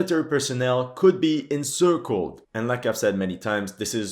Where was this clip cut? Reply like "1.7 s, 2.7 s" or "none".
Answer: 2.4 s